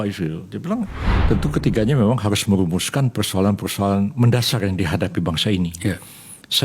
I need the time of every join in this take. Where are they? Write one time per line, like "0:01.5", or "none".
0:01.1

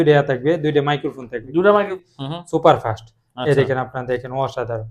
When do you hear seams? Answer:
0:02.0

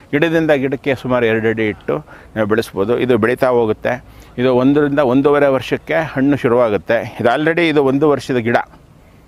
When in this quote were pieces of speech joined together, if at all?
none

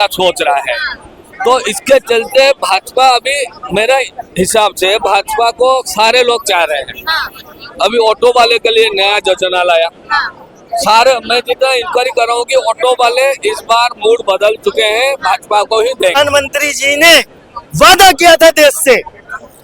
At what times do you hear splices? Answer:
0:16.2

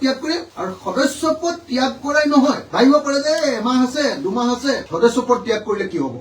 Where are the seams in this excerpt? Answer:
none

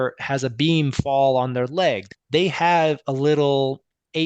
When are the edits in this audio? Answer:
0:02.1

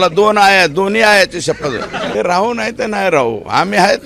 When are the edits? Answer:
0:02.1

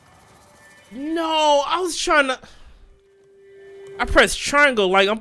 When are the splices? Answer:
none

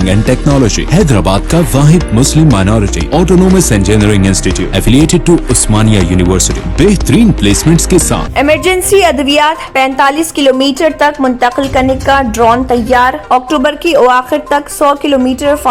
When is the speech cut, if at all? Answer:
0:08.3

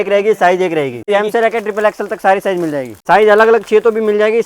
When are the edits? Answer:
0:01.1
0:02.9

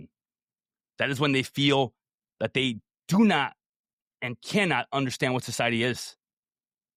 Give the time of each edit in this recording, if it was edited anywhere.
none

